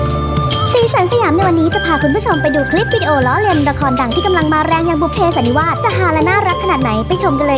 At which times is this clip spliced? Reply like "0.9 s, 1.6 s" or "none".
none